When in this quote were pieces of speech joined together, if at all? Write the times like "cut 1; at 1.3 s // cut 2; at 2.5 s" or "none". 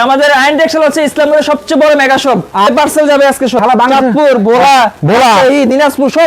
cut 1; at 2.7 s // cut 2; at 3.6 s

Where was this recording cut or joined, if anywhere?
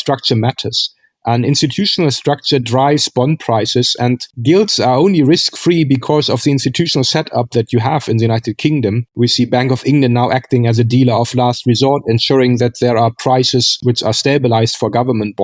none

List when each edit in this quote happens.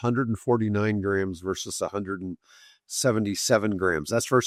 none

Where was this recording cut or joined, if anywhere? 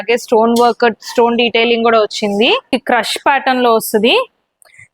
cut 1; at 2.7 s

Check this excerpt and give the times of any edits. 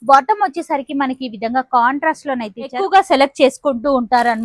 cut 1; at 2.8 s

